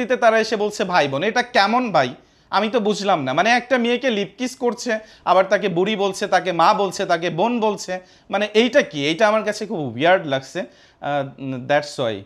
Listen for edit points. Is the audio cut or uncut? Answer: uncut